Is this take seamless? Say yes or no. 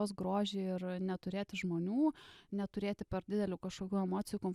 yes